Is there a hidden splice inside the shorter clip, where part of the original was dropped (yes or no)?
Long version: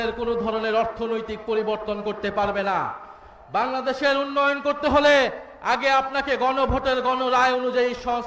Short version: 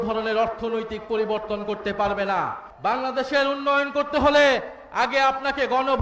yes